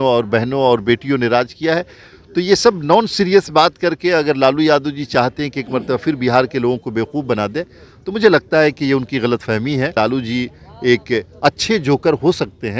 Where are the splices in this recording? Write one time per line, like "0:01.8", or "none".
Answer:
0:09.9